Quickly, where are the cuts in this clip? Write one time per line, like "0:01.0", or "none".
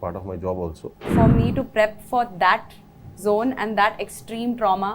0:01.1